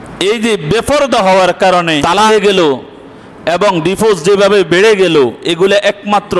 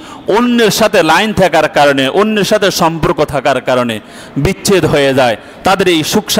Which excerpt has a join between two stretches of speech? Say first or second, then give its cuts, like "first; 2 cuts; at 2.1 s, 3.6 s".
first; 1 cut; at 2.2 s